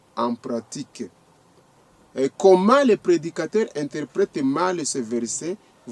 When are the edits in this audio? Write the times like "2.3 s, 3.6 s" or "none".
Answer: 1.7 s